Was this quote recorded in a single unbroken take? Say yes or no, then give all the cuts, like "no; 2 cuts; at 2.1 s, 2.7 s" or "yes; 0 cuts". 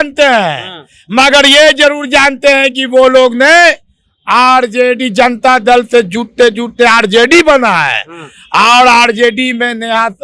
yes; 0 cuts